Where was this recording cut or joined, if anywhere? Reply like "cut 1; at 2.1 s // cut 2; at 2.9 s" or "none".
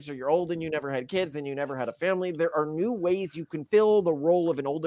cut 1; at 3.6 s